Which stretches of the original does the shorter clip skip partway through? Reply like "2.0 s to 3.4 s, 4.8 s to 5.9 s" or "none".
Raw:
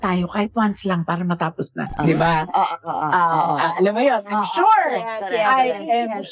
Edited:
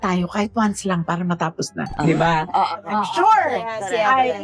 2.8 s to 4.3 s